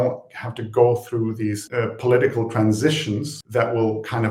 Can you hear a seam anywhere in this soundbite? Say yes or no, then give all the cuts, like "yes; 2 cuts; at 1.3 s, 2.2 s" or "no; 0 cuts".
yes; 1 cut; at 3.4 s